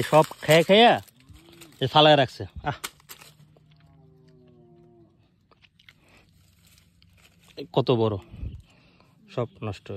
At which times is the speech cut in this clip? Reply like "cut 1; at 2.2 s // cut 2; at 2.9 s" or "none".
none